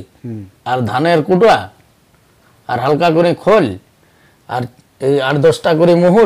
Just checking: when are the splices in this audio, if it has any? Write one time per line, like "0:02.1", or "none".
none